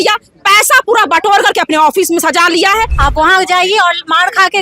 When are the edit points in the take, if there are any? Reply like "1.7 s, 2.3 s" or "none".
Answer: 2.9 s